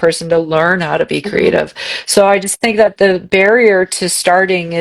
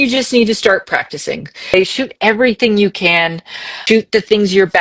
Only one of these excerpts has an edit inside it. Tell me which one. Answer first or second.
second